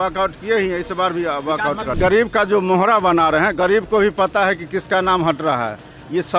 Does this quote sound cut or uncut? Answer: cut